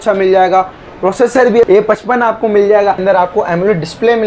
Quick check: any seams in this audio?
yes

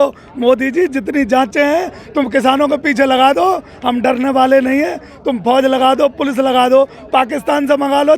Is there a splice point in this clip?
no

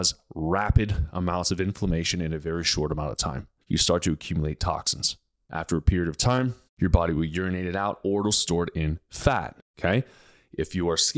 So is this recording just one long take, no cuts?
no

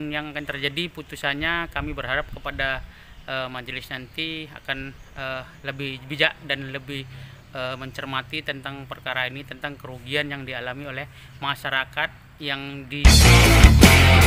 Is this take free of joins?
no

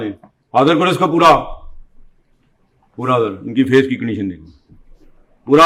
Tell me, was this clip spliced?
no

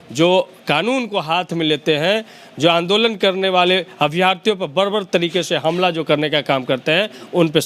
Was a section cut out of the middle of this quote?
no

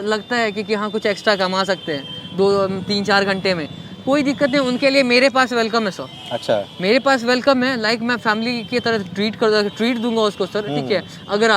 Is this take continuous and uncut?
yes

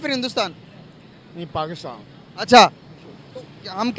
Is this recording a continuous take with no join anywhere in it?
yes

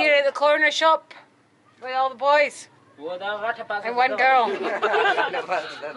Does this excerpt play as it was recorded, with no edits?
yes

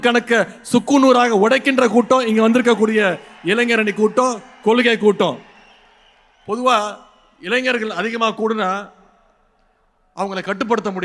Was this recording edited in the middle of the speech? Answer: no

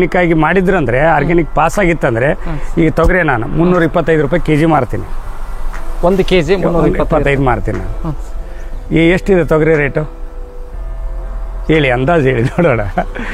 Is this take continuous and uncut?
yes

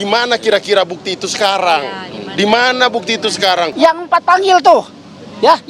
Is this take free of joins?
no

